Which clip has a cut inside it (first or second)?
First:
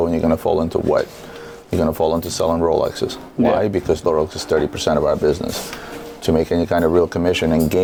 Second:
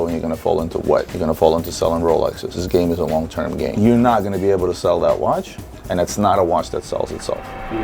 second